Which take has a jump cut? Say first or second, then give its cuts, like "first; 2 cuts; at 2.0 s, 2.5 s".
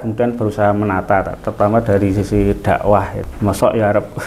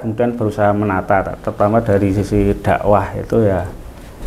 first; 1 cut; at 3.2 s